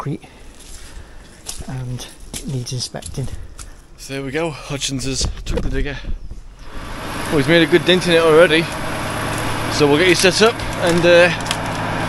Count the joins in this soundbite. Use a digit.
2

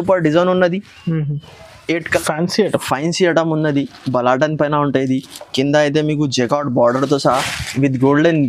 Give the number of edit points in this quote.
1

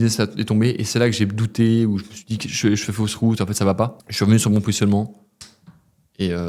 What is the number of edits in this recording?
1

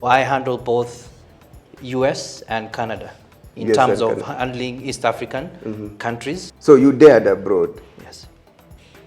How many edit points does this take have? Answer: 1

